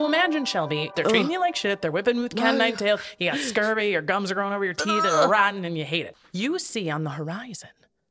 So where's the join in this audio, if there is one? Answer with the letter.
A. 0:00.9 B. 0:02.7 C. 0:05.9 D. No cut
A